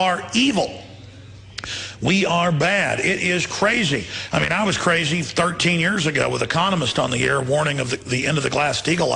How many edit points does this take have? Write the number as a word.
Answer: one